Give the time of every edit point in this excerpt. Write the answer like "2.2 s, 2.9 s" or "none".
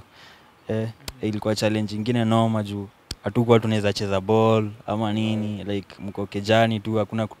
none

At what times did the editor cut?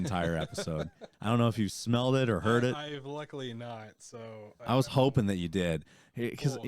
none

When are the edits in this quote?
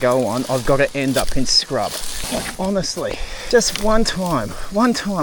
2.1 s, 3.3 s

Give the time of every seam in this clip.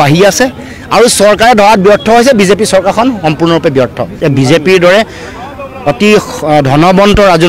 4.0 s

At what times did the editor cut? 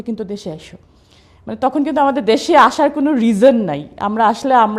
none

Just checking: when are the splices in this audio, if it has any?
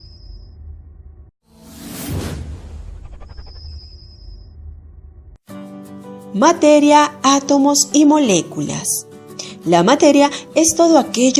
none

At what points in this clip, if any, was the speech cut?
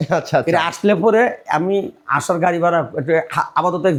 none

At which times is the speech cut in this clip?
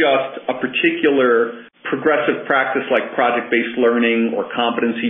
1.7 s

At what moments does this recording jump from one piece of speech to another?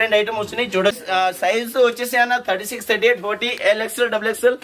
1.0 s

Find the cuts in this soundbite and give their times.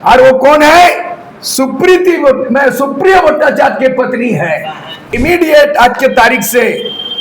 5.1 s

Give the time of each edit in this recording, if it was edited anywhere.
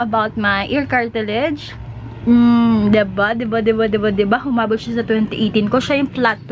none

